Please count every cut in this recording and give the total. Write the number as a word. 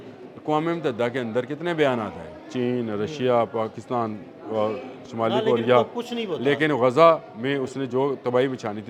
zero